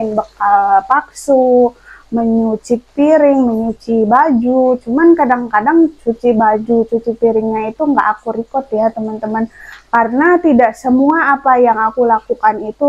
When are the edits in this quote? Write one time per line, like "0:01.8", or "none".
none